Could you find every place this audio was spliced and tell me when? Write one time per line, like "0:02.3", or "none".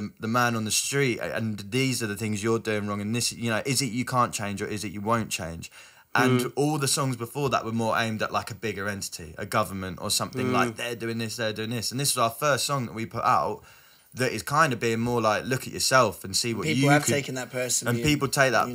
none

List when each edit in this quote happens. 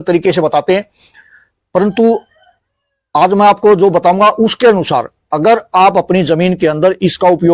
none

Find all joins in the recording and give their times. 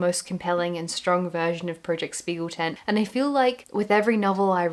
none

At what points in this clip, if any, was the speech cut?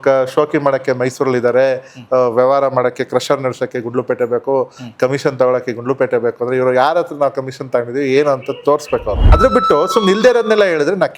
0:09.3

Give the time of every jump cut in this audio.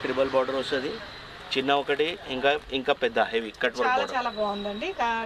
none

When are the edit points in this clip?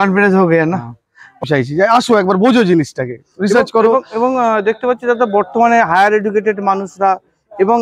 0:01.4

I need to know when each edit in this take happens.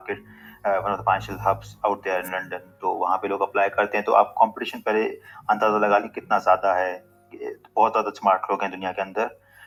none

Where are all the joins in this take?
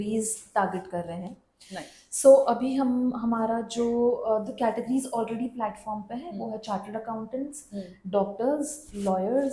none

